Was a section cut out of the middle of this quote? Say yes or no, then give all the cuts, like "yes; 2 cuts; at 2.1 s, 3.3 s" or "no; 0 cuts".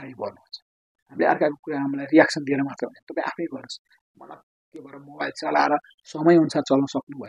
yes; 1 cut; at 6.0 s